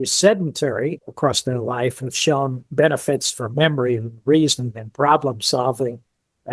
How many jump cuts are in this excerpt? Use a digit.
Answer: 1